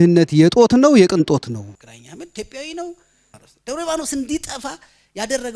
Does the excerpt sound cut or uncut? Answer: cut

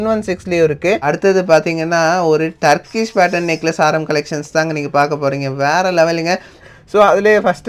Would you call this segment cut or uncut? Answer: cut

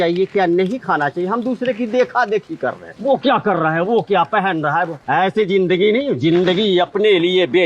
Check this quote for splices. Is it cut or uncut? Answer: uncut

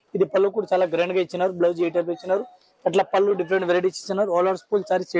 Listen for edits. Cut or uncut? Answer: uncut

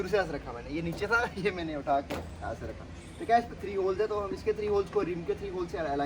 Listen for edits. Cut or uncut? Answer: uncut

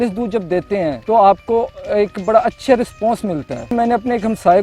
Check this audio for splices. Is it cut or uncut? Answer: cut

